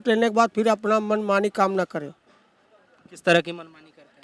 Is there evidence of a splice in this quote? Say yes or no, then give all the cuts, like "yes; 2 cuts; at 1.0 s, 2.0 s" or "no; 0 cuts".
no; 0 cuts